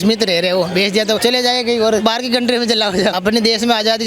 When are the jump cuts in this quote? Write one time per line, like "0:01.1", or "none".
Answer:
0:01.2
0:02.0
0:03.2